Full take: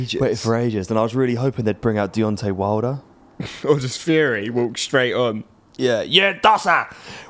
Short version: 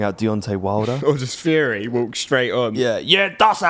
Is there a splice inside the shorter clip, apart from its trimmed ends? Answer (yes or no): yes